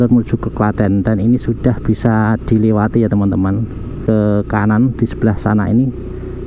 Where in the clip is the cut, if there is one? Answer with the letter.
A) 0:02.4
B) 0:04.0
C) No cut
B